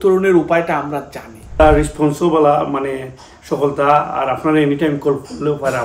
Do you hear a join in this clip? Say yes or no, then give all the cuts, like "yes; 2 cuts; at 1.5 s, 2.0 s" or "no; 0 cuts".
yes; 1 cut; at 1.6 s